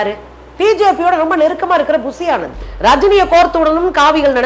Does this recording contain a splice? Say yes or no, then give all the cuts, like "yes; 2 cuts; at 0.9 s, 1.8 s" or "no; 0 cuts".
yes; 1 cut; at 2.7 s